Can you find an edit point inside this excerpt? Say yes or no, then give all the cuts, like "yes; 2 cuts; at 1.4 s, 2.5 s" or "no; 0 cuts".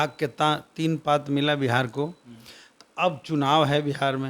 no; 0 cuts